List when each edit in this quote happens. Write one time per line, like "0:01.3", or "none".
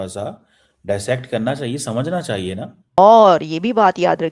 0:03.0